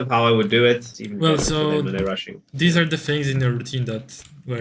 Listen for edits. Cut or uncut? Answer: cut